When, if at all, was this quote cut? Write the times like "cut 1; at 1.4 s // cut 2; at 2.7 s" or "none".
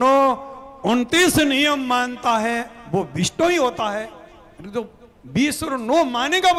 none